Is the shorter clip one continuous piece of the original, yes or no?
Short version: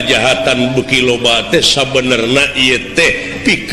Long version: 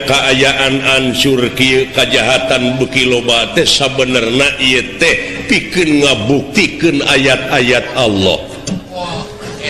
yes